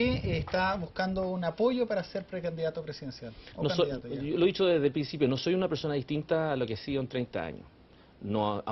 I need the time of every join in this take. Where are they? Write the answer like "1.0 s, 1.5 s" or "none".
none